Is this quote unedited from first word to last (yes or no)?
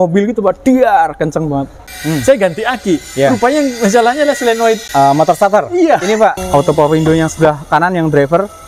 no